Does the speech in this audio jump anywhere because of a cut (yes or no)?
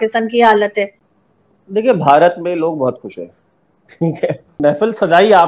yes